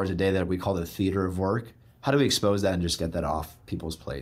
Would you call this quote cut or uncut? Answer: uncut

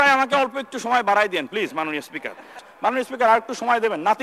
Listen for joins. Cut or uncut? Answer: cut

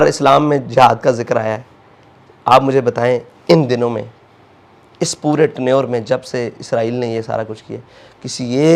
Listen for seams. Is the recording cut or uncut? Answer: uncut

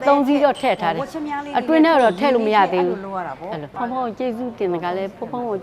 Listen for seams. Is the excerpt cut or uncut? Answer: cut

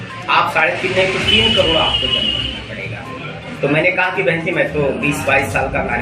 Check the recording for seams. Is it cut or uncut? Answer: uncut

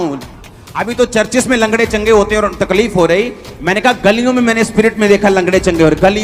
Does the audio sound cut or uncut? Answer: uncut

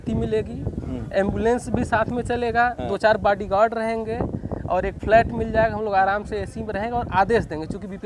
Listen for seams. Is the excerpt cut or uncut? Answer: uncut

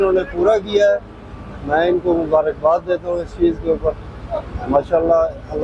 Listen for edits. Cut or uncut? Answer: uncut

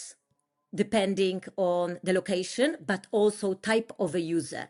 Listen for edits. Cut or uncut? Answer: uncut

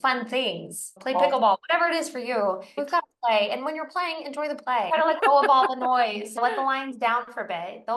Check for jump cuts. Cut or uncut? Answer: cut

